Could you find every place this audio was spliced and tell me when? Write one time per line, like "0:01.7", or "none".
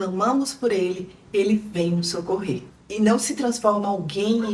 0:02.7